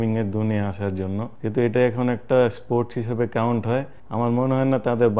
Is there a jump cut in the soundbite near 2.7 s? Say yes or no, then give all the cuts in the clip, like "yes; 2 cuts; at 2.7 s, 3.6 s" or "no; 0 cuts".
no; 2 cuts; at 1.3 s, 4.0 s